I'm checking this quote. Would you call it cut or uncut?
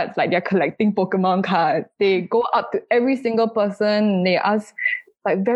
uncut